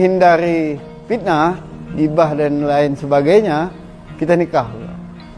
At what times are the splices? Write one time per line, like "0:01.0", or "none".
none